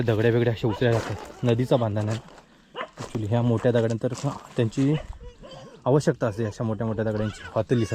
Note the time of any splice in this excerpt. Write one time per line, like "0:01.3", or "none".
none